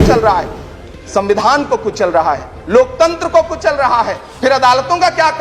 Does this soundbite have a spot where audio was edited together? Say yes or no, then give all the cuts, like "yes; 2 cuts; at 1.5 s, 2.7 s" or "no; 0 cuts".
yes; 1 cut; at 4.2 s